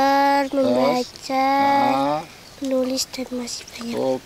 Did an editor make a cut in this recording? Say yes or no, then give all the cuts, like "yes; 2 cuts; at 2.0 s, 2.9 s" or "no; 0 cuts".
no; 0 cuts